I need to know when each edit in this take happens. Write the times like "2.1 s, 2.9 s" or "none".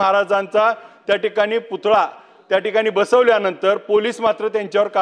none